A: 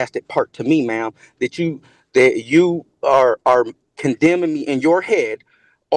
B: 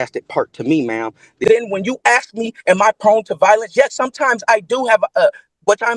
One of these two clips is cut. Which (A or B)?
B